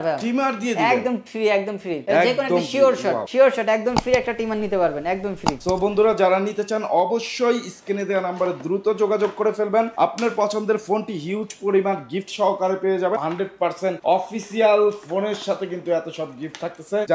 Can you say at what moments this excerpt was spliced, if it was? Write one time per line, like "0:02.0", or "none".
none